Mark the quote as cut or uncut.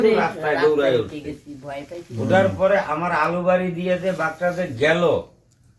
uncut